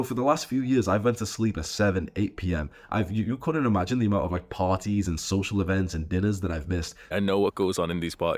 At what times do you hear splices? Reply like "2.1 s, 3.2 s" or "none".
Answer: 7.1 s

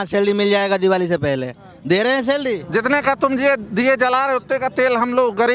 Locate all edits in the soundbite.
2.6 s

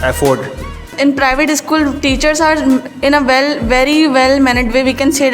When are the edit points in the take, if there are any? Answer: 0.9 s

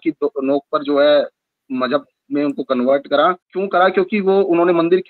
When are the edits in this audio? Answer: 3.5 s

